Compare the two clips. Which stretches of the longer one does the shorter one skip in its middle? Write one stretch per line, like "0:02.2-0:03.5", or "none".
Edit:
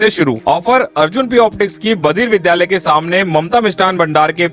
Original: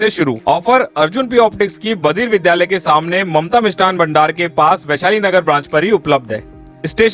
none